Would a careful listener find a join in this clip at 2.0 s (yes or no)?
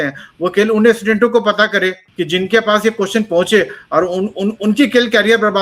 yes